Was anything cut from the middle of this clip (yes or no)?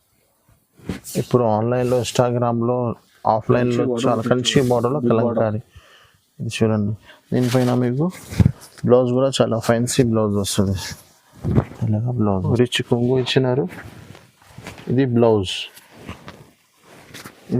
yes